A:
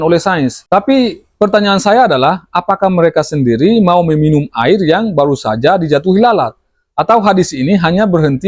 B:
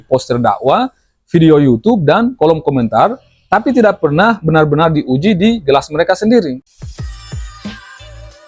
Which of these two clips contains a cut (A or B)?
B